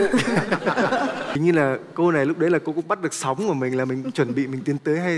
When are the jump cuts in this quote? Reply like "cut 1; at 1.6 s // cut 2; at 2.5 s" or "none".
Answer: cut 1; at 1.3 s